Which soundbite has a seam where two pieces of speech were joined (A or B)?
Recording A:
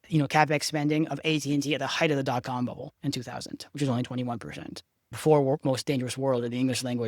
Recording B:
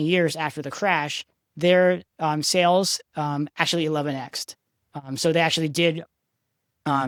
A